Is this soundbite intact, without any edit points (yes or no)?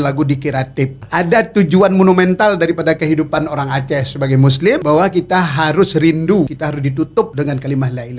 no